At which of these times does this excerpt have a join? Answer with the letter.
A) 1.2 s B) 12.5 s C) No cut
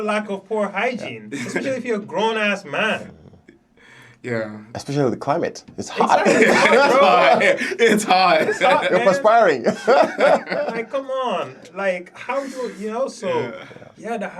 C